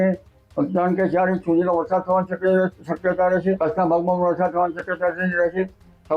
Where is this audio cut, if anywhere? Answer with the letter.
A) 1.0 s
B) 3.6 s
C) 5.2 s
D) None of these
B